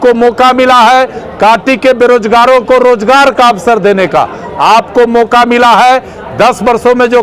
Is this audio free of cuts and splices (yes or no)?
yes